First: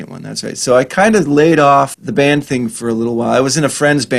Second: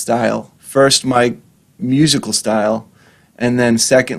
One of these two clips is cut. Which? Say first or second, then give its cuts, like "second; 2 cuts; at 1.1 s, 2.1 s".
first; 1 cut; at 2.0 s